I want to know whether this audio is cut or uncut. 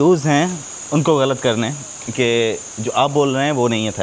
uncut